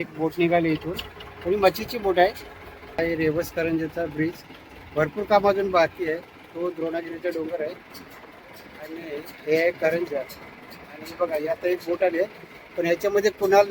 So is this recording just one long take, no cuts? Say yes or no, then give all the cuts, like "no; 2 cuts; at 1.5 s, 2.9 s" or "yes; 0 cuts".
no; 1 cut; at 3.0 s